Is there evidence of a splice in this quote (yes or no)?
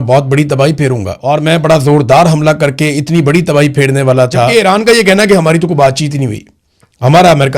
yes